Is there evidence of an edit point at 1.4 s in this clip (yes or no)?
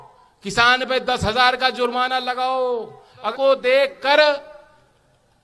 no